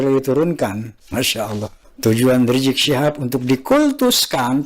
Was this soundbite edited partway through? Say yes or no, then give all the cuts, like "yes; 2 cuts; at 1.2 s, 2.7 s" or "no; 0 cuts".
yes; 1 cut; at 1.3 s